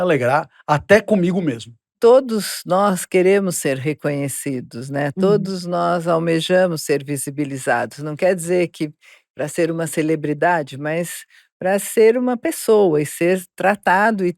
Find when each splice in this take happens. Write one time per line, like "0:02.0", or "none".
0:01.9